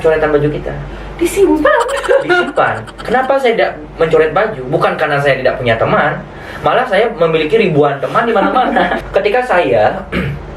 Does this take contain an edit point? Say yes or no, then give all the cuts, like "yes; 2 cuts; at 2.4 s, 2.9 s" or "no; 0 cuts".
yes; 2 cuts; at 2.9 s, 9.0 s